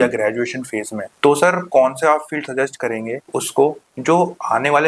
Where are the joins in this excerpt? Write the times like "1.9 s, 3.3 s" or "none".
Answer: 1.0 s, 3.2 s

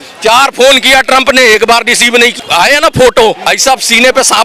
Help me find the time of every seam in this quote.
2.4 s, 3.5 s

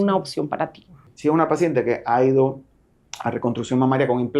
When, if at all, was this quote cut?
1.1 s

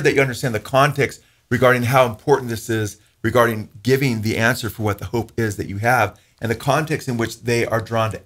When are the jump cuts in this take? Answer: none

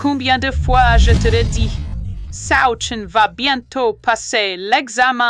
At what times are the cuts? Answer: none

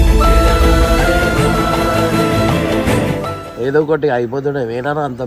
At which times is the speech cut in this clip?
3.4 s

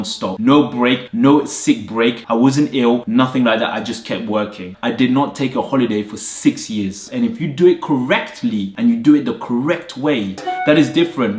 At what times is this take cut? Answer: 4.7 s, 7.0 s, 10.4 s

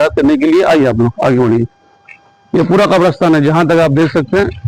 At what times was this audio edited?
none

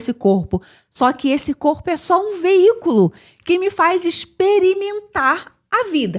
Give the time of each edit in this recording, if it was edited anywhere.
none

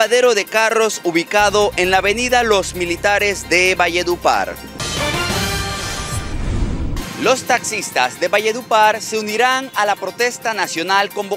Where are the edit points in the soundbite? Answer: 4.7 s, 6.9 s

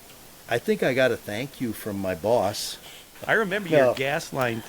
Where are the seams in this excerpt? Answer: 3.0 s

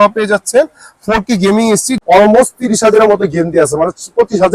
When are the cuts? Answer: 1.9 s

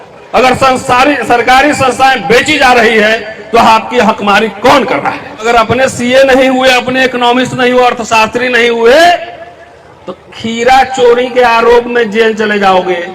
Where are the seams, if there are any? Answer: 5.4 s

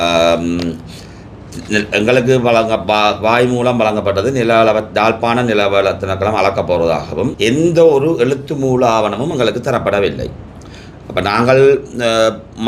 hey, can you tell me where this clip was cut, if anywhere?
7.3 s

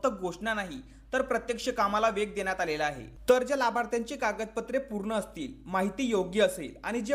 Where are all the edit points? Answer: 3.1 s

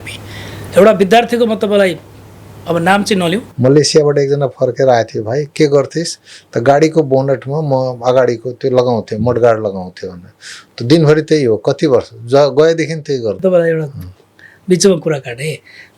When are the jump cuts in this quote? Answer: 3.5 s, 13.4 s

